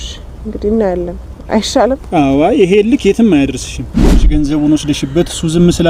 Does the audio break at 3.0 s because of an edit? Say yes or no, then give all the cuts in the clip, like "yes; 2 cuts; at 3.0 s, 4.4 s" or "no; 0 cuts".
no; 1 cut; at 4.3 s